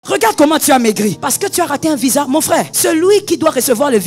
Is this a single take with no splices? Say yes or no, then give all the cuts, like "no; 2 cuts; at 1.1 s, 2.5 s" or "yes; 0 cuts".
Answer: no; 2 cuts; at 1.2 s, 2.7 s